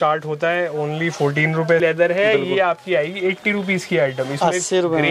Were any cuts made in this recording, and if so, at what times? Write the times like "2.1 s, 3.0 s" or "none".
1.8 s